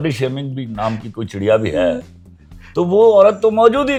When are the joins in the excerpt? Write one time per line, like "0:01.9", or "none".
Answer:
none